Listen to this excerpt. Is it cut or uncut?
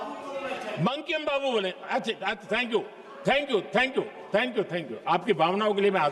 uncut